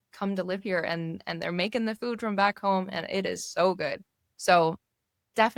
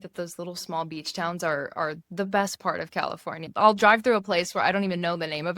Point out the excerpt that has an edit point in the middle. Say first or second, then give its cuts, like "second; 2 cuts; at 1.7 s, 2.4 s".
second; 1 cut; at 3.5 s